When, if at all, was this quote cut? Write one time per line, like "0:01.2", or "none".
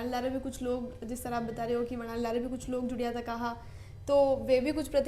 none